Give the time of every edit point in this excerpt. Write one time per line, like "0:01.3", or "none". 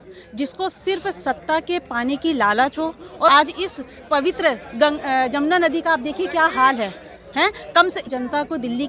0:03.3
0:08.1